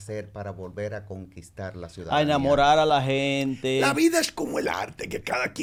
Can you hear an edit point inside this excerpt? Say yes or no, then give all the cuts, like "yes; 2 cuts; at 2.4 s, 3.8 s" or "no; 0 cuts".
no; 0 cuts